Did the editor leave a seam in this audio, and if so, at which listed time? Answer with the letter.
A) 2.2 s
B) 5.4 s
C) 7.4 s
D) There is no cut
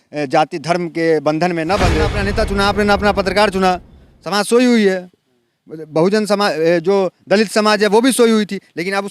A